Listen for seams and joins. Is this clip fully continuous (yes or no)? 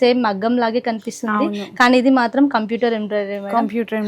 yes